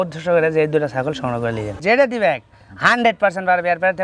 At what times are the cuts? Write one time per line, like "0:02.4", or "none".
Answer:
0:01.8